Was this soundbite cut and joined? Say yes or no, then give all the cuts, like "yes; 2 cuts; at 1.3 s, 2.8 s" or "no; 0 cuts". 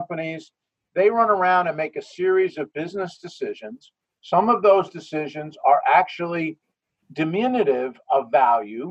yes; 1 cut; at 7.0 s